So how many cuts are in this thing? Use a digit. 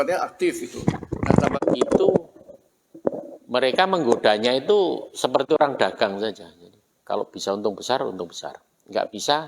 1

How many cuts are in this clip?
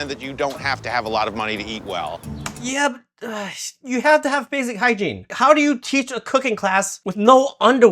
2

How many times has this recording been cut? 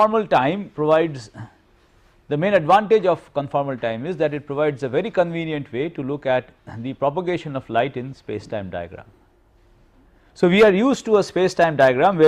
1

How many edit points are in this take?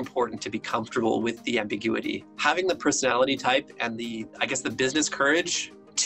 1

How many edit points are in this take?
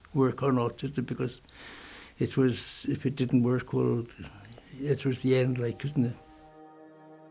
1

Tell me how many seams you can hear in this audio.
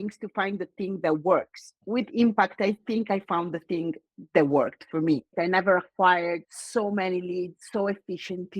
3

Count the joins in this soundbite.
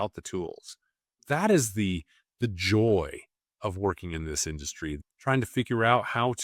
1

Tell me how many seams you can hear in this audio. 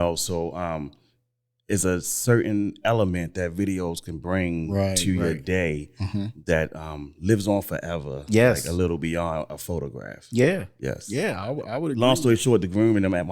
1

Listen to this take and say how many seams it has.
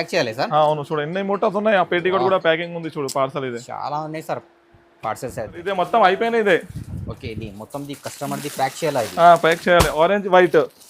1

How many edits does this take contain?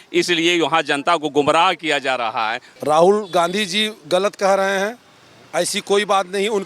1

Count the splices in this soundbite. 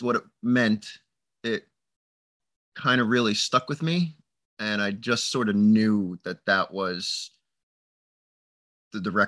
0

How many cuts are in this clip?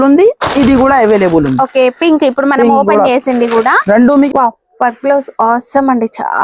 1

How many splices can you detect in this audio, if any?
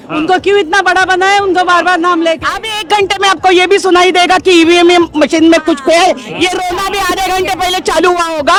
0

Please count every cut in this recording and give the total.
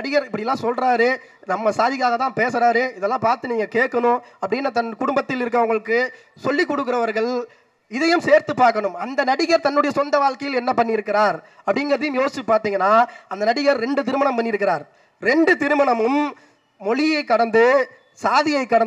0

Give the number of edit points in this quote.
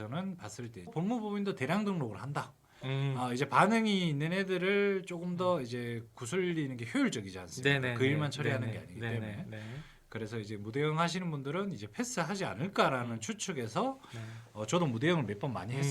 1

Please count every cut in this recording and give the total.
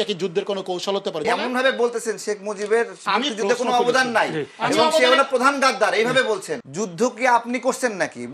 2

